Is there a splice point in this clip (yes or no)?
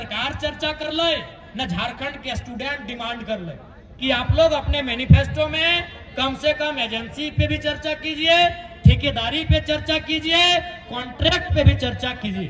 no